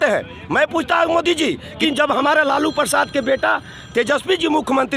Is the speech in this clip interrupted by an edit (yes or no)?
yes